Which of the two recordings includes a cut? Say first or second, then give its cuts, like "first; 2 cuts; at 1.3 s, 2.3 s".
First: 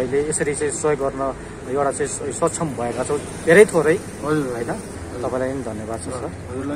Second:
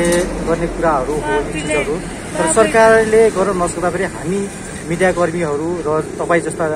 first; 1 cut; at 5.0 s